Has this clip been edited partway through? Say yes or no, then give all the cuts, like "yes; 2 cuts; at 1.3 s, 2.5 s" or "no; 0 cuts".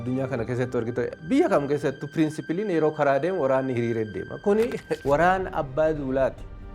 yes; 1 cut; at 4.9 s